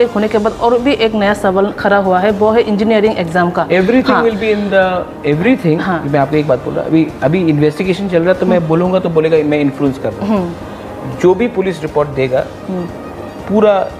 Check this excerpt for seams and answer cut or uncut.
uncut